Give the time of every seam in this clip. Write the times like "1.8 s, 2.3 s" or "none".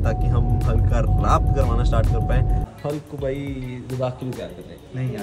2.7 s